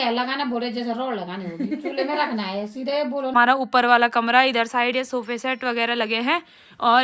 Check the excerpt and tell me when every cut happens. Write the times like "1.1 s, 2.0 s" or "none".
3.3 s